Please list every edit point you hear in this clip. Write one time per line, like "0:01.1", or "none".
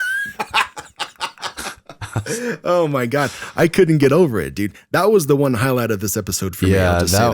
0:01.1